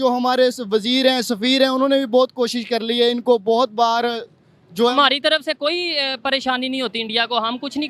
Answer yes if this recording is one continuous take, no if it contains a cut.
yes